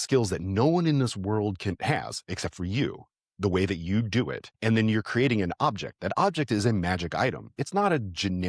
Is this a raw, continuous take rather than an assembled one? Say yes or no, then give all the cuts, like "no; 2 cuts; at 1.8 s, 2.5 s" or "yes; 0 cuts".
no; 1 cut; at 4.4 s